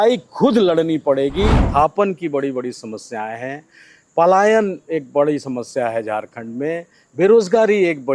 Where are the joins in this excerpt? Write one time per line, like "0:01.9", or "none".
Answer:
0:01.6